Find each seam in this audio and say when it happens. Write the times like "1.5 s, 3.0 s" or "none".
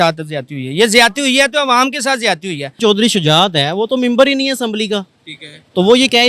2.8 s